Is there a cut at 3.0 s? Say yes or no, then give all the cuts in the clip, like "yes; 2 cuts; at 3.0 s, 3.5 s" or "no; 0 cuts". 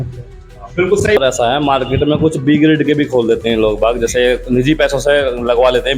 no; 1 cut; at 1.2 s